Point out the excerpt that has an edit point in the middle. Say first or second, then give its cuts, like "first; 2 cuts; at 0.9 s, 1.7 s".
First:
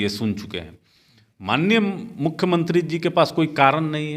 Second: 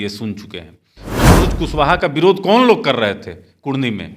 second; 1 cut; at 1.3 s